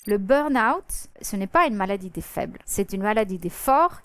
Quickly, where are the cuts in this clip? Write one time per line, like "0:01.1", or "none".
0:01.2
0:02.6